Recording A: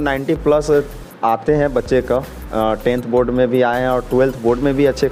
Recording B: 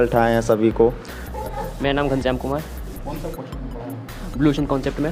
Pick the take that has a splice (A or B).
B